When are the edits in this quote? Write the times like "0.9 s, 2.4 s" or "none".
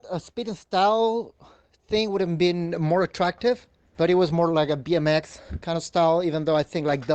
3.8 s